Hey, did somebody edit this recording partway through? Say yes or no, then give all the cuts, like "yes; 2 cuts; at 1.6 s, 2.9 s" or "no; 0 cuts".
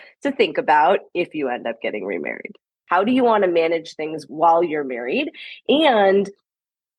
yes; 2 cuts; at 2.8 s, 4.3 s